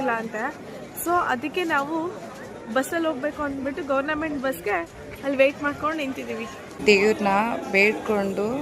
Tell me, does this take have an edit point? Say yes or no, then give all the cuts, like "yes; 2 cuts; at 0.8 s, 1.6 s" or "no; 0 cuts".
yes; 1 cut; at 6.7 s